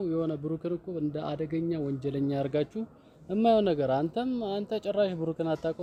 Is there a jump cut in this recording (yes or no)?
no